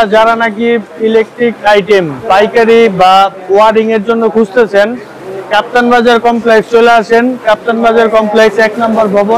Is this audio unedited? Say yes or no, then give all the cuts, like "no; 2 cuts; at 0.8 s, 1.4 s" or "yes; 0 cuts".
yes; 0 cuts